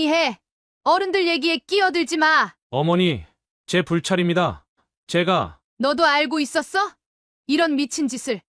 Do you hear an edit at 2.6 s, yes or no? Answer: yes